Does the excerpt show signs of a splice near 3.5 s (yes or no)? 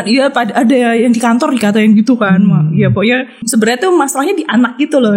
yes